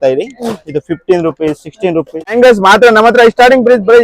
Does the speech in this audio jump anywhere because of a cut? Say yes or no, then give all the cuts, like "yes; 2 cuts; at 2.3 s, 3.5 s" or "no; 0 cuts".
yes; 1 cut; at 2.3 s